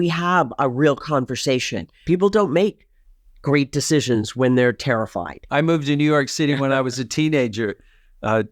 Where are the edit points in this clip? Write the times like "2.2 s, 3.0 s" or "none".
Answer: 1.9 s, 5.4 s